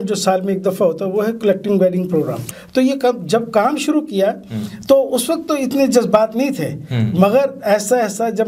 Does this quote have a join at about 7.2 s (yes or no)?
no